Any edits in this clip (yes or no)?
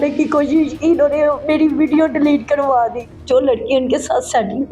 yes